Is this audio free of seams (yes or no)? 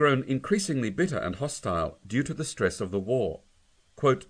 yes